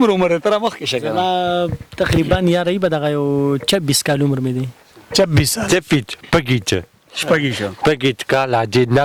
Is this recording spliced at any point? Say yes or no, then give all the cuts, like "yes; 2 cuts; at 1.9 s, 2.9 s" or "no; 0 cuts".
no; 0 cuts